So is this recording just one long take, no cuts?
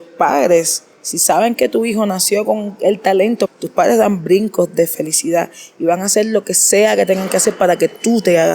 no; 2 cuts; at 3.5 s, 4.9 s

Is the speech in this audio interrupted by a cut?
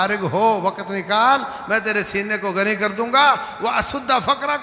no; 0 cuts

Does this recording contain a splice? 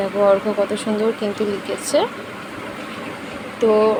no; 0 cuts

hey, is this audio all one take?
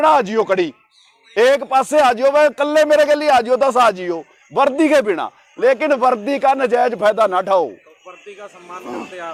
yes; 0 cuts

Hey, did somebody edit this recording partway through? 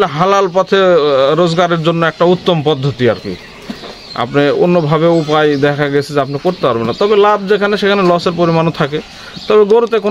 no; 0 cuts

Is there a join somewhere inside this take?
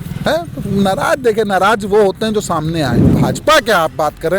yes; 1 cut; at 3.2 s

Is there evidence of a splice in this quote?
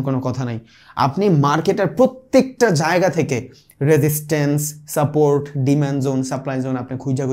no; 0 cuts

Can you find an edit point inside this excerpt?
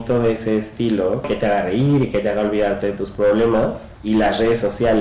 yes; 2 cuts; at 1.3 s, 3.9 s

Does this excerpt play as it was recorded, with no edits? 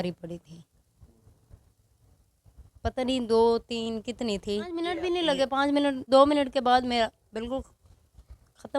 no; 1 cut; at 4.9 s

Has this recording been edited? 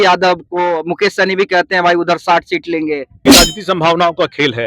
yes; 1 cut; at 3.1 s

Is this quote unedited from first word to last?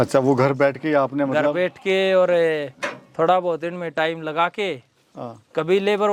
yes; 0 cuts

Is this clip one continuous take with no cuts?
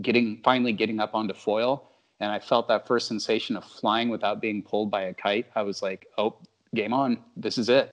yes; 0 cuts

